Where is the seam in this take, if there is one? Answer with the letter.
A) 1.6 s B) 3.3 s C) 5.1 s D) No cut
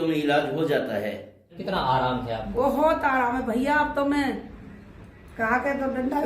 A